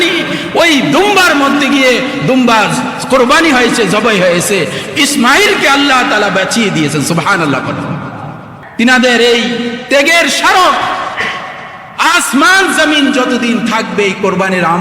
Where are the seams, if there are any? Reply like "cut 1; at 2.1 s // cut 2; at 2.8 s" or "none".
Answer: cut 1; at 8.6 s